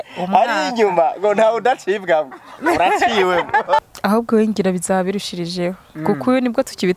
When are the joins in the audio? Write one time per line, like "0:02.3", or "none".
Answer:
0:03.8